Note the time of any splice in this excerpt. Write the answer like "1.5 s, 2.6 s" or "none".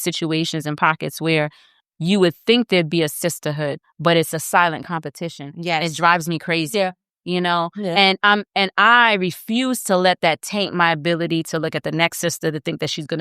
none